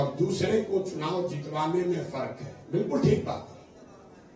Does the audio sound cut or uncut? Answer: uncut